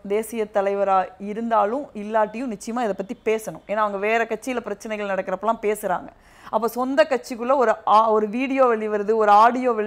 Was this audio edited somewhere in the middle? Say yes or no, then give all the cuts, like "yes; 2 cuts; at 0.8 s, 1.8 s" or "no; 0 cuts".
no; 0 cuts